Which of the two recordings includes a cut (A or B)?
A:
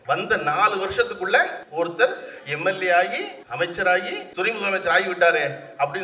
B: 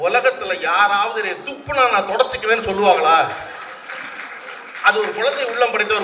A